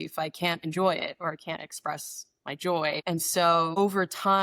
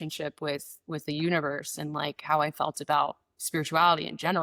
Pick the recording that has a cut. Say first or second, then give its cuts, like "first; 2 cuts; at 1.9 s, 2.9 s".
first; 1 cut; at 3.0 s